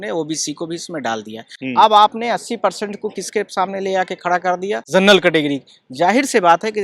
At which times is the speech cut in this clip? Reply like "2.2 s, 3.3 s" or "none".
1.5 s, 4.8 s